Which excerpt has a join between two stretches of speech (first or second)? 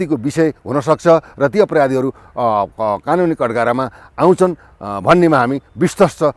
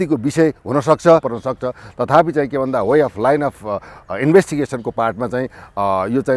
second